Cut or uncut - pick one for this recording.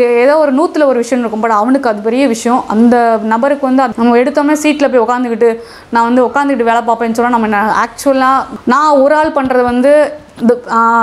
cut